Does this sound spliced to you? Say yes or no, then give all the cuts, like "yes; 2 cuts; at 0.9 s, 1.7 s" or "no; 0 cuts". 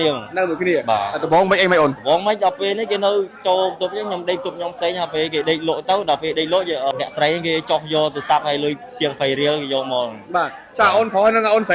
yes; 1 cut; at 6.9 s